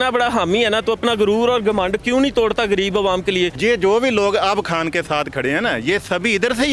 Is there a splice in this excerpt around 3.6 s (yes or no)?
yes